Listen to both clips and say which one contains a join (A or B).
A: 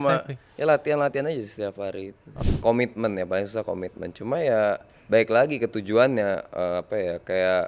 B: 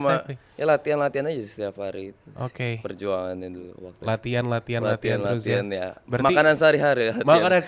A